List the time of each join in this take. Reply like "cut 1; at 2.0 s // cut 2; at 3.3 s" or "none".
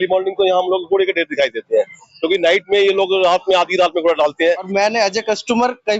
cut 1; at 4.7 s

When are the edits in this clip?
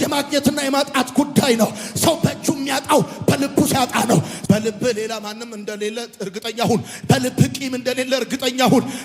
cut 1; at 4.3 s

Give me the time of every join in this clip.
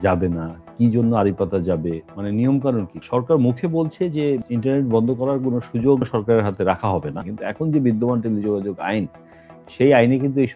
cut 1; at 2.1 s // cut 2; at 3.0 s // cut 3; at 4.4 s // cut 4; at 6.1 s // cut 5; at 7.2 s

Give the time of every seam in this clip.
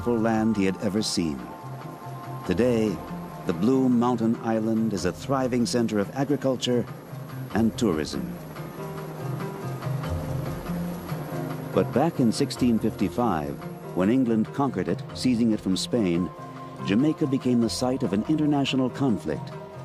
none

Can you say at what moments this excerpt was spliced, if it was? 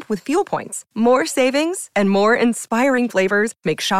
none

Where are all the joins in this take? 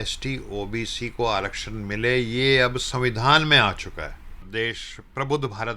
cut 1; at 4.5 s

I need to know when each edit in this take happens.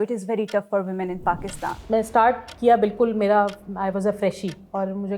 cut 1; at 1.8 s

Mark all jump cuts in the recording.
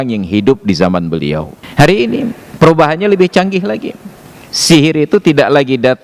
cut 1; at 1.6 s // cut 2; at 2.4 s

